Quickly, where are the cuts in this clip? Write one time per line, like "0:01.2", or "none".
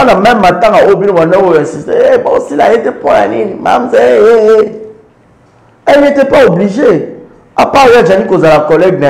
none